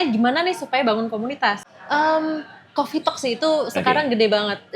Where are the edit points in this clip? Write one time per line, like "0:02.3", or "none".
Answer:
0:01.6

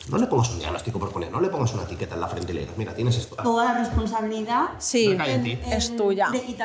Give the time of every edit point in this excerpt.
0:03.3

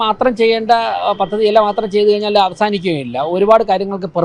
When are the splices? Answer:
none

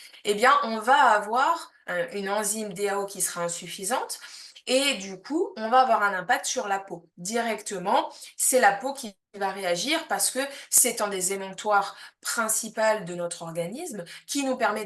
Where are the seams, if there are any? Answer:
0:01.8

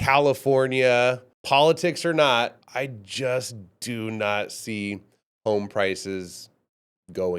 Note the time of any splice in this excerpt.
0:01.3
0:02.6

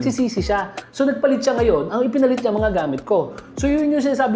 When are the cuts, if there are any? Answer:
none

